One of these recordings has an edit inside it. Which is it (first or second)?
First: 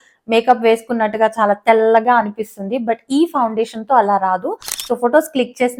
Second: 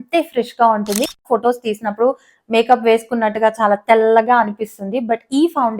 second